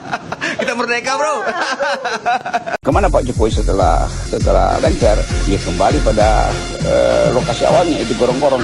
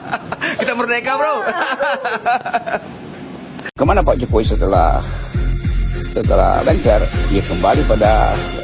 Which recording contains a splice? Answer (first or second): first